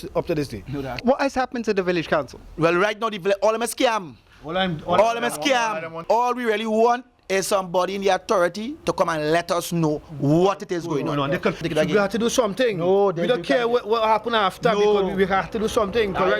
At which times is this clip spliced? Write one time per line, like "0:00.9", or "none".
0:01.0
0:05.9
0:11.6